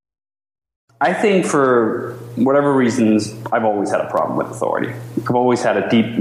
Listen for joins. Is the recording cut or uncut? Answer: cut